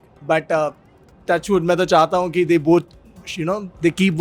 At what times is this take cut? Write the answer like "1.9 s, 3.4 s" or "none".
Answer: none